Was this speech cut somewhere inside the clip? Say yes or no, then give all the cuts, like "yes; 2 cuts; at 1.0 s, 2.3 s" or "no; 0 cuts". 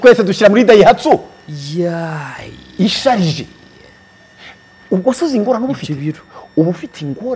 no; 0 cuts